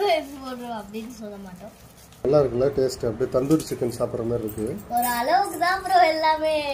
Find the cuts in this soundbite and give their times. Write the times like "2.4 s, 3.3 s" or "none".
2.2 s